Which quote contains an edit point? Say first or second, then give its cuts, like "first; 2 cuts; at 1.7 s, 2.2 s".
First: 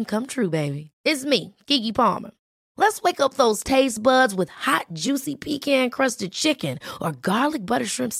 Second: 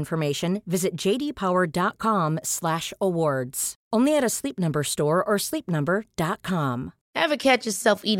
second; 1 cut; at 7.0 s